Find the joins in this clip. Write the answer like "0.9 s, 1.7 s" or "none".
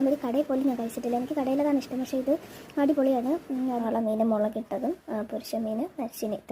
3.8 s